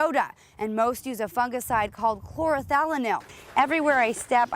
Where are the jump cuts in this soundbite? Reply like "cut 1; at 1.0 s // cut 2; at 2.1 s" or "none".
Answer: cut 1; at 3.3 s